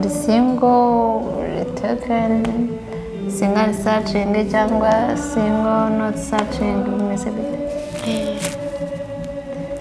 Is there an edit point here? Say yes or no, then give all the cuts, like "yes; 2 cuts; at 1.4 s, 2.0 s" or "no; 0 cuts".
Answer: no; 0 cuts